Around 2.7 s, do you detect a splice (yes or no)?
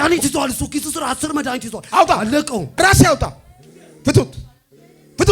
yes